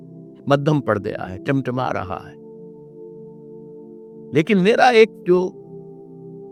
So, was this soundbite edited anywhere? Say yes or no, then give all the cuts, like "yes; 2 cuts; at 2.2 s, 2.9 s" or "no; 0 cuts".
no; 0 cuts